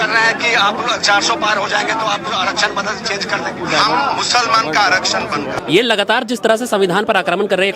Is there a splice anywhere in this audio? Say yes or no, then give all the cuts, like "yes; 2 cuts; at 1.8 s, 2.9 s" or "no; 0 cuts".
yes; 1 cut; at 5.5 s